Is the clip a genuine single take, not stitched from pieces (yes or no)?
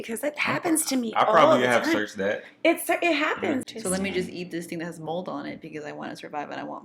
no